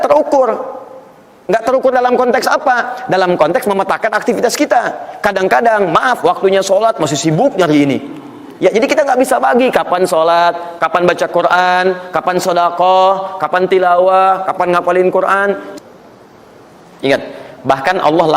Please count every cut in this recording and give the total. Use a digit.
1